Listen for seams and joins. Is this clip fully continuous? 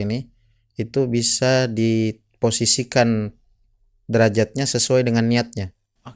yes; 0 cuts

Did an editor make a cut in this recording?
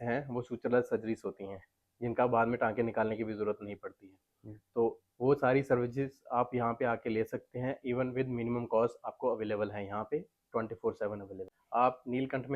yes; 1 cut; at 11.5 s

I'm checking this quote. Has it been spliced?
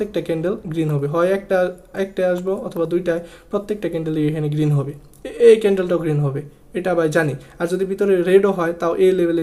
no; 0 cuts

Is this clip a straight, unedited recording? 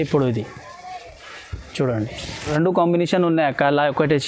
no; 1 cut; at 2.4 s

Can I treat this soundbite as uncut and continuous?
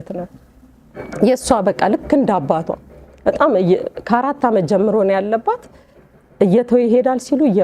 yes; 0 cuts

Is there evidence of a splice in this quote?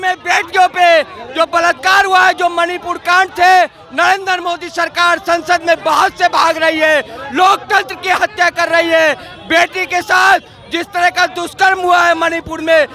no; 0 cuts

